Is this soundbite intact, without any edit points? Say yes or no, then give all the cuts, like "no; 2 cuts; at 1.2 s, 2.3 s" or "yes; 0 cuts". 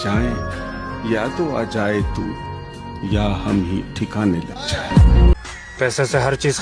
yes; 0 cuts